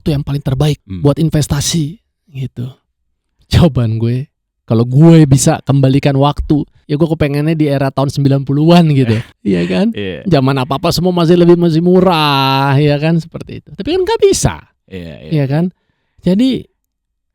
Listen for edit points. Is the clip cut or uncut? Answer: cut